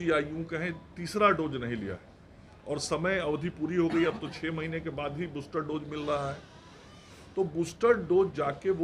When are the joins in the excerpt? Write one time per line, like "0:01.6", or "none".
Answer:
none